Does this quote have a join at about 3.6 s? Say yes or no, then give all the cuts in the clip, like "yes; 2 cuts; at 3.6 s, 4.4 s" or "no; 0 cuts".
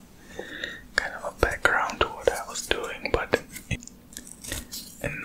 yes; 1 cut; at 3.6 s